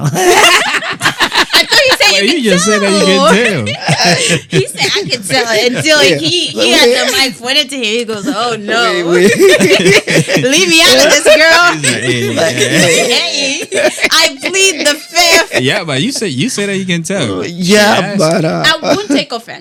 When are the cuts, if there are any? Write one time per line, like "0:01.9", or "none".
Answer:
none

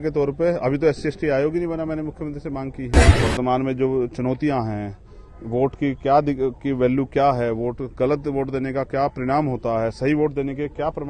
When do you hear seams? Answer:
0:03.0

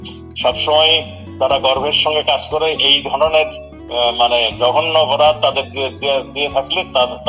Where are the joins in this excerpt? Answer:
none

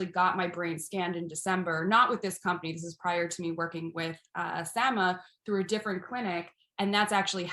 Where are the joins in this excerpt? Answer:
none

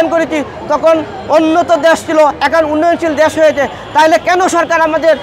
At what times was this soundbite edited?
none

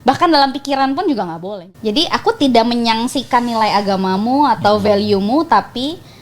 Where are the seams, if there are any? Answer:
0:01.4

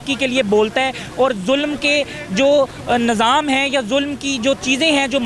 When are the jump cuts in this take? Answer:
none

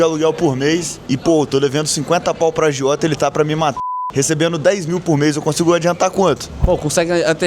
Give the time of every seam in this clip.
0:00.9
0:03.8

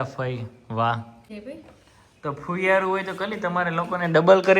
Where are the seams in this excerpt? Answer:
0:01.3

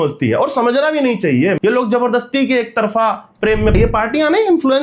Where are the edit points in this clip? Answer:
0:01.6
0:03.7

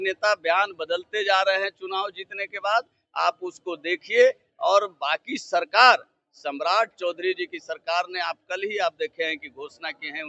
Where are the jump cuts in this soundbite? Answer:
none

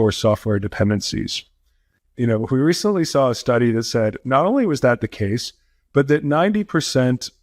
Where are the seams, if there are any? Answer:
none

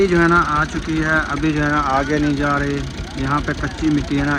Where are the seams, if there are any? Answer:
none

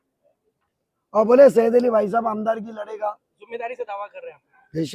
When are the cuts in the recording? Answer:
none

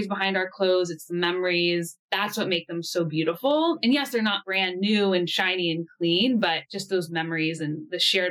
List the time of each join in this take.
0:02.0
0:06.7

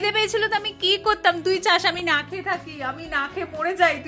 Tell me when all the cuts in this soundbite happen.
none

